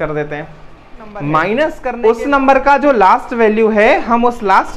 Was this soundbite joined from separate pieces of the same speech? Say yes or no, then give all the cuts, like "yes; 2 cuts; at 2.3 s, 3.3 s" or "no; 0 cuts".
yes; 1 cut; at 1.9 s